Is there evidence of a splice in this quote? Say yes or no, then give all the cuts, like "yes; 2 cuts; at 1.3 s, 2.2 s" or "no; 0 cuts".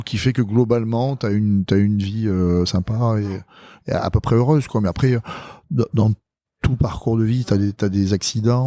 no; 0 cuts